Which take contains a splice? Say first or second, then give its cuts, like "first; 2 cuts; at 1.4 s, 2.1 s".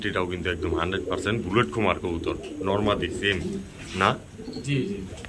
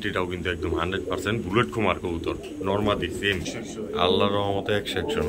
second; 1 cut; at 3.5 s